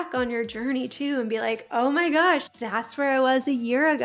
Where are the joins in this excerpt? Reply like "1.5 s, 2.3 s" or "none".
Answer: 2.4 s

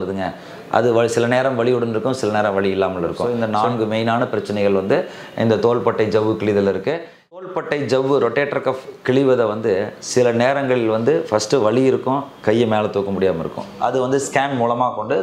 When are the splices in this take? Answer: 3.2 s, 7.4 s, 13.6 s

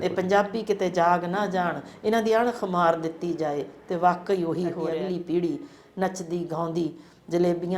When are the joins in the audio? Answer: 4.9 s

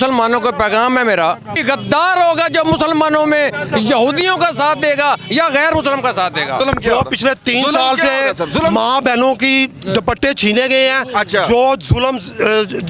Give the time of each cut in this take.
1.5 s, 6.6 s

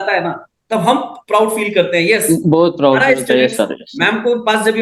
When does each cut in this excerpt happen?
none

